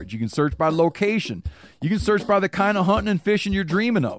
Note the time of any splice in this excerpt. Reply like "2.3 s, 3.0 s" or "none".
none

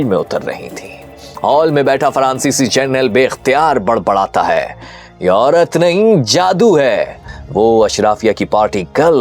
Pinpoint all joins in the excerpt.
7.2 s

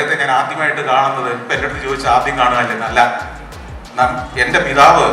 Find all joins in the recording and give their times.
none

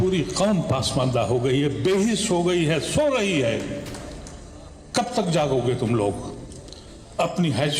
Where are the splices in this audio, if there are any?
none

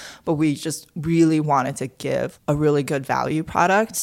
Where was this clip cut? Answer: 2.3 s

